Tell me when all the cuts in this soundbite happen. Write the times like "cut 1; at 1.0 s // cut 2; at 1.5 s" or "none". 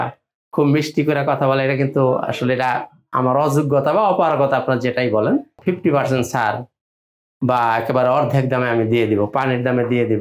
cut 1; at 5.6 s